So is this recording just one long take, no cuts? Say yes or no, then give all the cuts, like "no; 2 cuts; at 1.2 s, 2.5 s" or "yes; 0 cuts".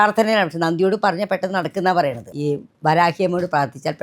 no; 1 cut; at 2.3 s